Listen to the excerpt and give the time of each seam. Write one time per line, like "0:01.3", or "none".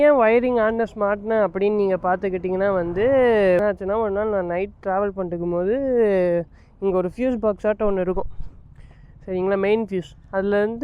0:03.6